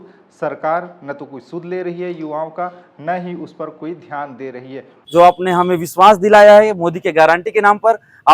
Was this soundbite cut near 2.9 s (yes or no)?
no